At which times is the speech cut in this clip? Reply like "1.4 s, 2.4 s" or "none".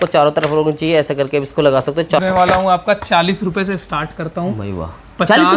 2.2 s